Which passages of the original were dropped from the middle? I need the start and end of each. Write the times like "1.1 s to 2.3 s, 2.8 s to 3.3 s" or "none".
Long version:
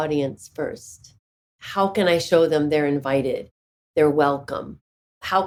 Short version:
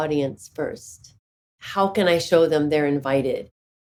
none